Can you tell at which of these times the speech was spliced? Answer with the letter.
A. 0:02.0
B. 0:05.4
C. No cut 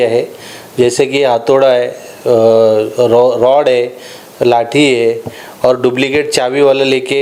C